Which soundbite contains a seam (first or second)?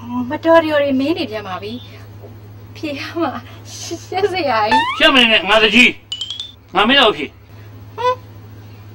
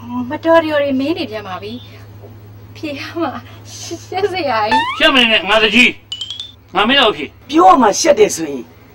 second